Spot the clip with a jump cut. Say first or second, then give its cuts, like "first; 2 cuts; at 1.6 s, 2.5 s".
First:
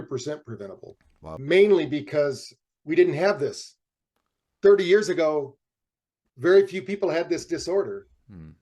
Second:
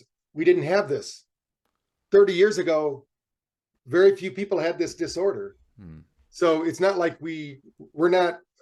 first; 1 cut; at 1.4 s